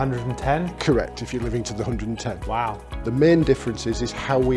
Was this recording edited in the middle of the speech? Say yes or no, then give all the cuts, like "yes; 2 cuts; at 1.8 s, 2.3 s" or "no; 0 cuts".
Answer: no; 0 cuts